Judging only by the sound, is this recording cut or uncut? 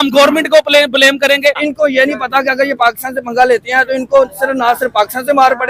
cut